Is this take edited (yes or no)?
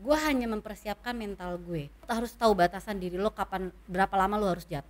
yes